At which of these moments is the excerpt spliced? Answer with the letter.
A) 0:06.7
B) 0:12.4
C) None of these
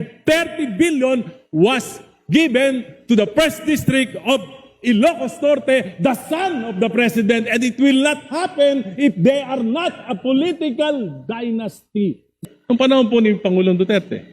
B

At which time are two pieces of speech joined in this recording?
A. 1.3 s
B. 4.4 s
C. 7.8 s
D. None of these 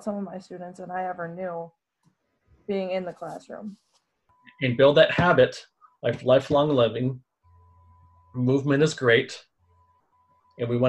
B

